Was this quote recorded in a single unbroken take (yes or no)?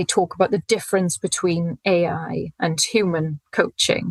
yes